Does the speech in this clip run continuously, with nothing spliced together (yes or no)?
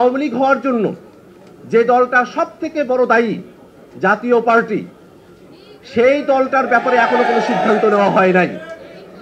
yes